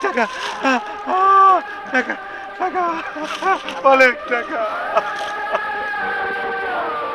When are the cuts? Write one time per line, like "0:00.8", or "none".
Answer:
0:05.0